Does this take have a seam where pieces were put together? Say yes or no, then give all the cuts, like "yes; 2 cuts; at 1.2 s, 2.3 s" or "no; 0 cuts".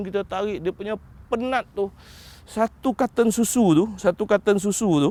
no; 0 cuts